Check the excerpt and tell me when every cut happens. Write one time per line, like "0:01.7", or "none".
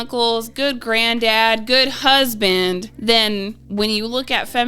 0:02.9
0:03.6